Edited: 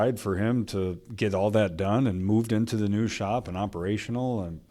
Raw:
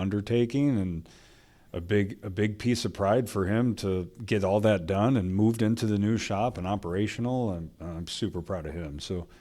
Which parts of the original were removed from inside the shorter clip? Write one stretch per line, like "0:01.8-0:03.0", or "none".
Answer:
none